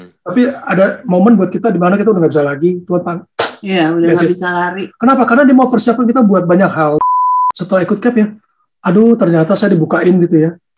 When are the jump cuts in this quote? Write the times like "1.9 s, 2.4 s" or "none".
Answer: 7.5 s